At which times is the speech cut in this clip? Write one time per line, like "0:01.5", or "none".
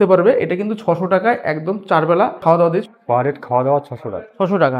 0:02.6